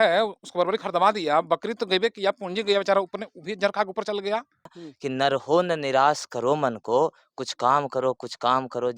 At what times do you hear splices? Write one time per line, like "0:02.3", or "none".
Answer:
0:04.9